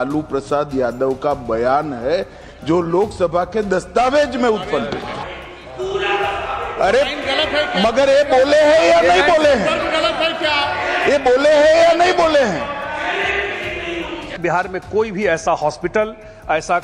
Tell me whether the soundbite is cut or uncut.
cut